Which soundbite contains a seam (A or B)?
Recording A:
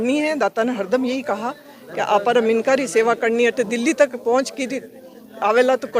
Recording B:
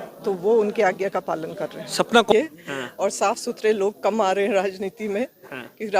B